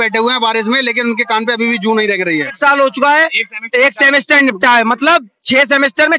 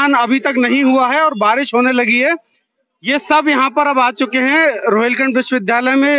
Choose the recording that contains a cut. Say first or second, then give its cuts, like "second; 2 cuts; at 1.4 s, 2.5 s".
first; 1 cut; at 2.5 s